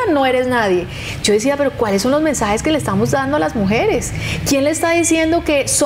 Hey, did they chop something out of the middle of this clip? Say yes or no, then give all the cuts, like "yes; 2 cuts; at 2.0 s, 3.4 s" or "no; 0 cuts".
no; 0 cuts